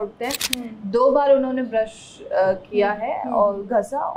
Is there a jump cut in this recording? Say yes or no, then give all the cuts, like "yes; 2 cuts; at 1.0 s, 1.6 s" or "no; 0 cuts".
no; 0 cuts